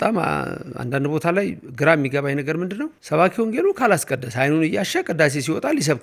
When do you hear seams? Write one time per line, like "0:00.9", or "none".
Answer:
0:03.0